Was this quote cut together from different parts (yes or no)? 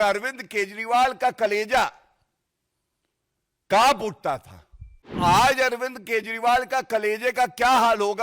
yes